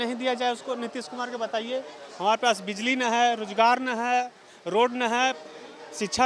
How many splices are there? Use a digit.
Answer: 0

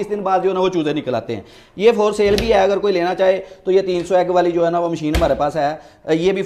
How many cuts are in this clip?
0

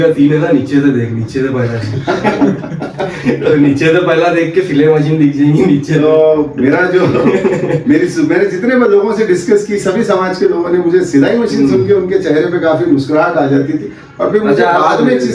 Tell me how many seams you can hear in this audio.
0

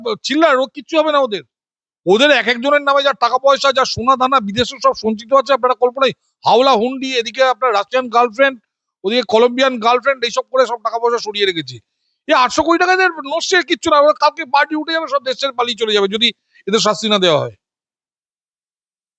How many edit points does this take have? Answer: 0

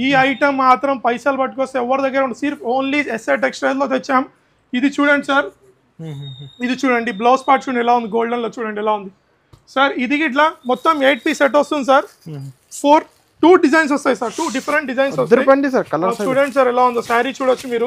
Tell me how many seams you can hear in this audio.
0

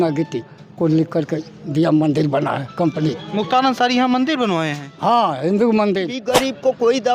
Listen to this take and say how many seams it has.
1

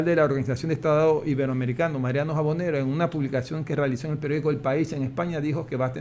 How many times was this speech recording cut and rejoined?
0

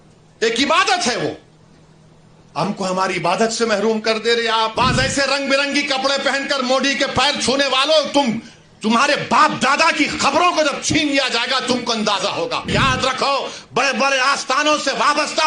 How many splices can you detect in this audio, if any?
2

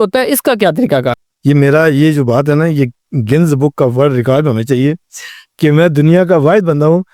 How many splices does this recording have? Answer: 1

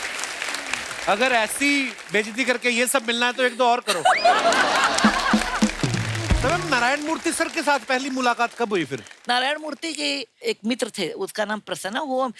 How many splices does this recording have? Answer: 1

